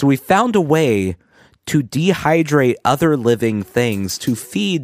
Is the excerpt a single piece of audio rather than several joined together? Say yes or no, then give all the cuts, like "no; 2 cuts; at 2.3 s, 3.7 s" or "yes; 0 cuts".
yes; 0 cuts